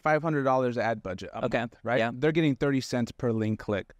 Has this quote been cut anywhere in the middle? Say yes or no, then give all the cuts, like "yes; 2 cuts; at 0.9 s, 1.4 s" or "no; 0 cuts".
no; 0 cuts